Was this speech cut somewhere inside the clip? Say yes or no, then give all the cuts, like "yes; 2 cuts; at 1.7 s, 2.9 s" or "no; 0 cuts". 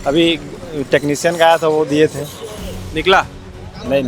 no; 0 cuts